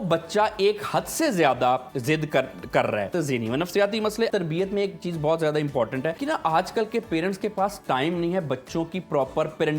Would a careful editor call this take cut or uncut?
cut